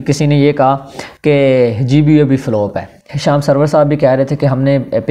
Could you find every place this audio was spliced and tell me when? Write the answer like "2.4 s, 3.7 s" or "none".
3.1 s